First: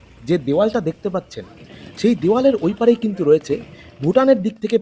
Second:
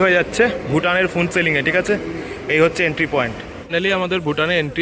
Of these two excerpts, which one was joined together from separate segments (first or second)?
second